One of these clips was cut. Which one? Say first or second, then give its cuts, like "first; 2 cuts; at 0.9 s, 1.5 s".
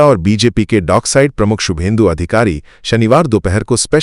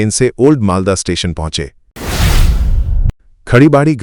second; 1 cut; at 2.0 s